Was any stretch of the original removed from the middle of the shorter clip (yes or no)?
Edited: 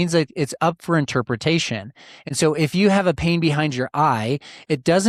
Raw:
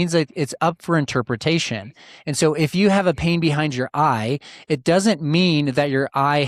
no